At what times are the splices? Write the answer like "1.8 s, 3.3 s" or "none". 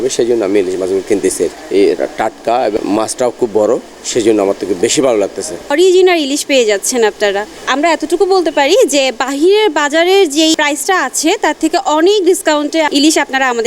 1.6 s, 2.8 s, 5.7 s, 10.5 s, 12.9 s